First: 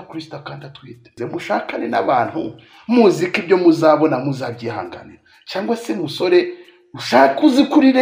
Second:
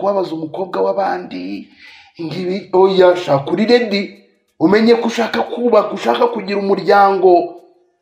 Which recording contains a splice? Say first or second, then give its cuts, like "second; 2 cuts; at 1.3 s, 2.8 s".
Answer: first; 1 cut; at 1.1 s